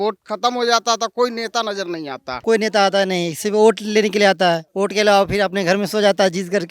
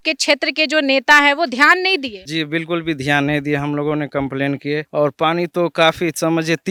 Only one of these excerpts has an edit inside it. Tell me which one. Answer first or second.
first